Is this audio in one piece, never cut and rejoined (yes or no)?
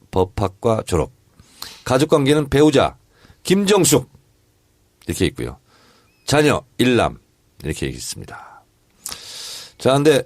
no